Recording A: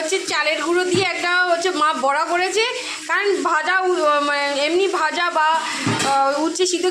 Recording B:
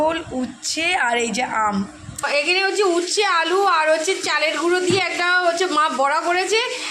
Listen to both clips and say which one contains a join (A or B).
B